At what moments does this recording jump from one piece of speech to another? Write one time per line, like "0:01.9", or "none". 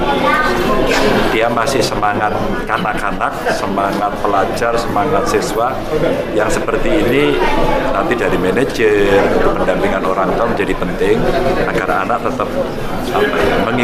none